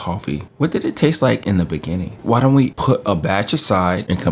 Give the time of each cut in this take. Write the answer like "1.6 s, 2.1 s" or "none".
none